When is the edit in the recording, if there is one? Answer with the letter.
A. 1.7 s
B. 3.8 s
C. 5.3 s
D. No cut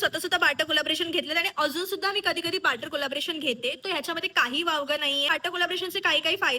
C